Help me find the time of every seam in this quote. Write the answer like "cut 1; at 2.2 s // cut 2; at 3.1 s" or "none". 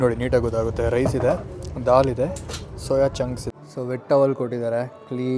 cut 1; at 3.4 s